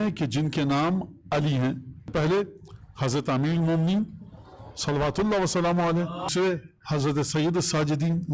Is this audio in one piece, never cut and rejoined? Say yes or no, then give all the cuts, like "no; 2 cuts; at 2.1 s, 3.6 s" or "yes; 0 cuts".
no; 2 cuts; at 2.1 s, 6.3 s